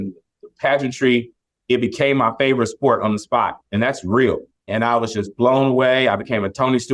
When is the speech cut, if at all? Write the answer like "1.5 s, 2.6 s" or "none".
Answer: 4.7 s